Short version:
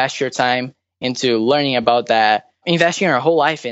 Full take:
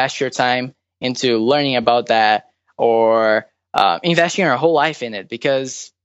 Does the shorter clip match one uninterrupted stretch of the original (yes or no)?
no